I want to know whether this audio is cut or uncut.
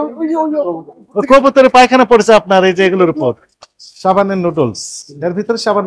uncut